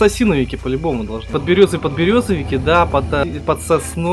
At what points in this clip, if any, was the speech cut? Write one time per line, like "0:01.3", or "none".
0:01.3
0:03.2